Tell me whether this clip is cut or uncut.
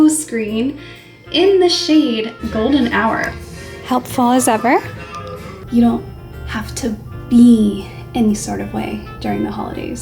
cut